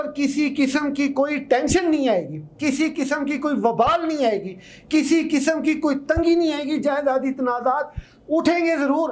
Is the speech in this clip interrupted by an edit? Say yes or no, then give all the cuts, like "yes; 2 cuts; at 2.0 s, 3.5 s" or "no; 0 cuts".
no; 0 cuts